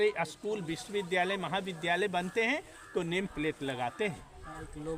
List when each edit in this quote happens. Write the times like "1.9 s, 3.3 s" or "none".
none